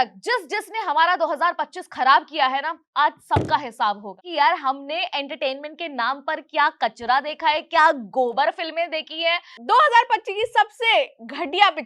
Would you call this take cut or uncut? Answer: cut